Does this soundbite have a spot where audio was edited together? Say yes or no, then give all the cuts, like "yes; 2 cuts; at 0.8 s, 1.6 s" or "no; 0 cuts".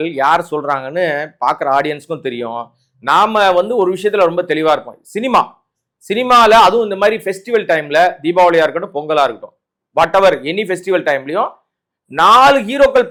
no; 0 cuts